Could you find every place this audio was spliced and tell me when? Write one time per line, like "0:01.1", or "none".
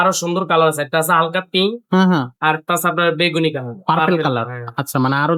none